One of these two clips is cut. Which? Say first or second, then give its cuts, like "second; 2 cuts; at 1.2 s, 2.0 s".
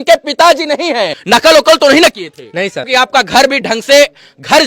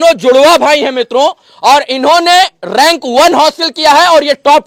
first; 2 cuts; at 1.2 s, 2.9 s